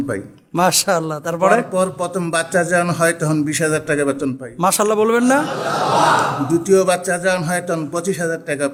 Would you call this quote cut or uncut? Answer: uncut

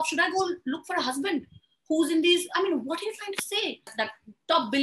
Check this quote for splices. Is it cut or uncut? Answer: cut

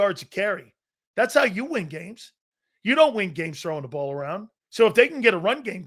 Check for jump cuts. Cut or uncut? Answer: cut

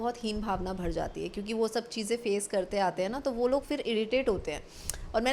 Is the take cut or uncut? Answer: uncut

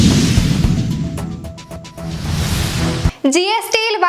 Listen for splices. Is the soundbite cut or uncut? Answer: cut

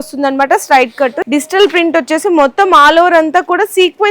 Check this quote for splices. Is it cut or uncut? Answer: cut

